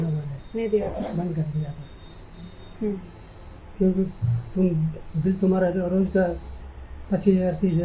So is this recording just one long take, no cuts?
yes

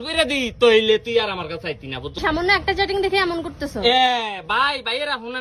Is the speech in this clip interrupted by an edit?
yes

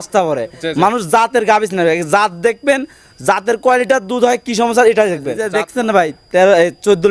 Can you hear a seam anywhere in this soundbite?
yes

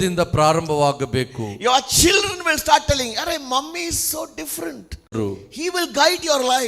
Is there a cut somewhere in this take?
yes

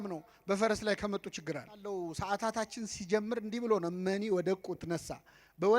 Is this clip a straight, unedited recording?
no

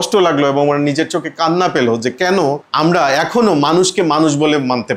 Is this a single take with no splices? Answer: yes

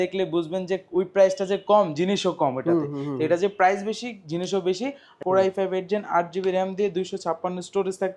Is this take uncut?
no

